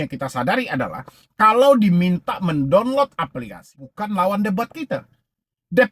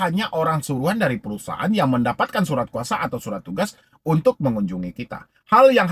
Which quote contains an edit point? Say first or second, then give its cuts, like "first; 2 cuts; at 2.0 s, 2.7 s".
first; 1 cut; at 3.9 s